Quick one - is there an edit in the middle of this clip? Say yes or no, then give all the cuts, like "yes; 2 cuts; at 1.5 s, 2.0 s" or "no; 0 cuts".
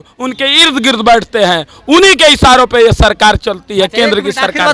no; 0 cuts